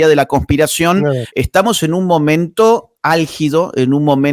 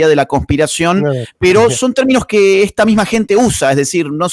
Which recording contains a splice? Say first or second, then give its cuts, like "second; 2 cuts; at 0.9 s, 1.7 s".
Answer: first; 1 cut; at 1.3 s